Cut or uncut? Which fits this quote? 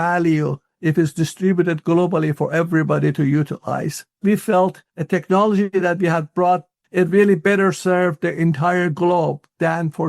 cut